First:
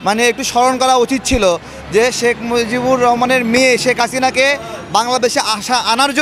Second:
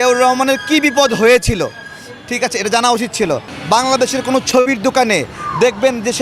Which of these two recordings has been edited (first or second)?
second